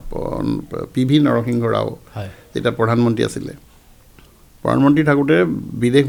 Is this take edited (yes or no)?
no